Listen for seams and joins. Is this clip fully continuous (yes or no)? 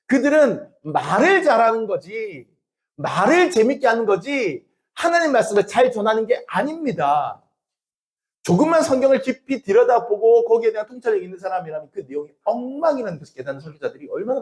yes